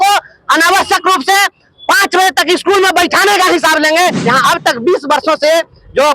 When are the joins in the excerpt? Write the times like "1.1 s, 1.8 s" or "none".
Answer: 4.2 s